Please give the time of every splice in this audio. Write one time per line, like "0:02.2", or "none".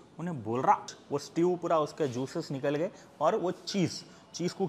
0:01.0